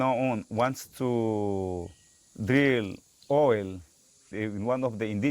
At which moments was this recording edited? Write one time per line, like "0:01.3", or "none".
0:04.2